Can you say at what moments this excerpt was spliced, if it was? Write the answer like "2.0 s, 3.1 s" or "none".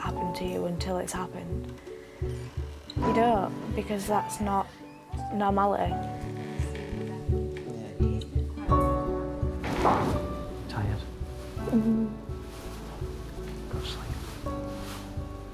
none